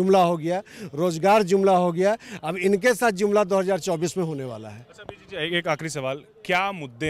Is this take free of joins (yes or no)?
yes